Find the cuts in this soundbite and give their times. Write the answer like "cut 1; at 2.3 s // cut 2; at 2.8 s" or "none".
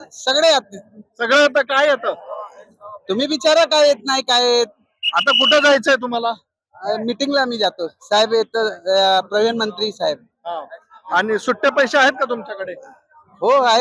none